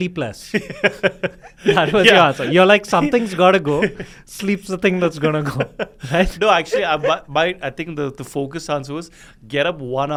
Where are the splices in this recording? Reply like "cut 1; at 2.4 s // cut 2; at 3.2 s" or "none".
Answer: none